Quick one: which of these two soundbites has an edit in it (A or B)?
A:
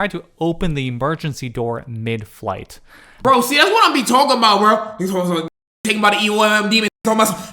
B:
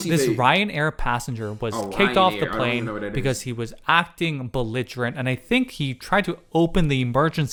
A